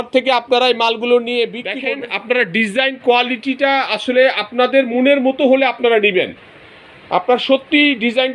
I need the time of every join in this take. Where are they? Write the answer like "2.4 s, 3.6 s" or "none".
1.6 s